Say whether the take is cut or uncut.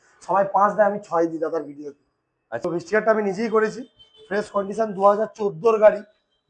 cut